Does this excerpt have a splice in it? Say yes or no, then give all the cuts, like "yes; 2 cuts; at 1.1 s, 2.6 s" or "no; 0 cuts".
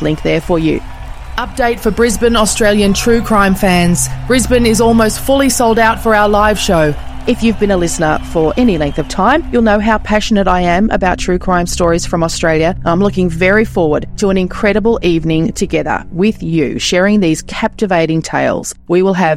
no; 0 cuts